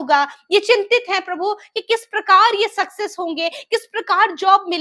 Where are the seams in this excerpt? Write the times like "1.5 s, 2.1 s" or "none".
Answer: none